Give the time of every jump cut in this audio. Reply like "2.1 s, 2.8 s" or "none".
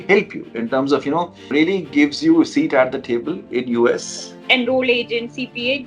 1.5 s, 4.4 s